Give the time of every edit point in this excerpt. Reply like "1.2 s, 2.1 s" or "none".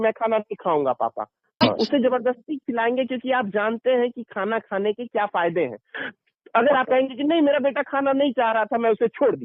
1.6 s